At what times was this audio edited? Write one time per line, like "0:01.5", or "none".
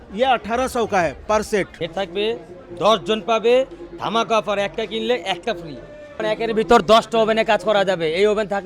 0:01.8
0:06.2